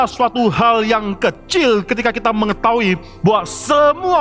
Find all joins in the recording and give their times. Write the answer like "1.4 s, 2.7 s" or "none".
none